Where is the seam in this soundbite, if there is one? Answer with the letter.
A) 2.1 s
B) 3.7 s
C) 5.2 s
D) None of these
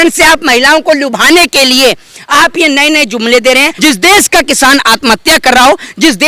B